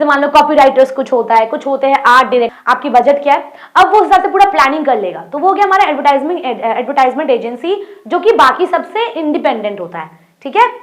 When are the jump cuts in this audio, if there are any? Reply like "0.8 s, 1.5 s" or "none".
2.5 s